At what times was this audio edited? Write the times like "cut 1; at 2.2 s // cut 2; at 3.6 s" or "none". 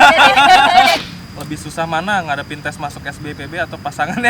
cut 1; at 1.0 s